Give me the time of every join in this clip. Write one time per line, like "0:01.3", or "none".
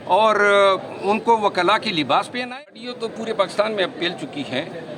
0:02.7